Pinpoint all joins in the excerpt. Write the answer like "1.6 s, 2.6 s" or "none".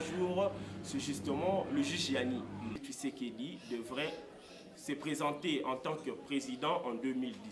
2.9 s